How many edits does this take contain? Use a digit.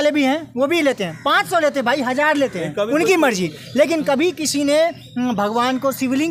0